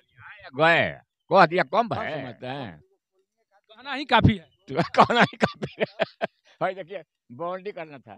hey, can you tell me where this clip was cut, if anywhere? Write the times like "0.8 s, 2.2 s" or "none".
2.1 s